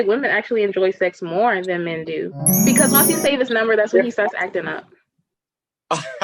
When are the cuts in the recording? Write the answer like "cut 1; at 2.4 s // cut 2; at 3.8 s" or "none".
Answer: cut 1; at 2.5 s